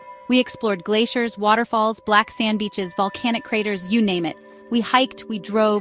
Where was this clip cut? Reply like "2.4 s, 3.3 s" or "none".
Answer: none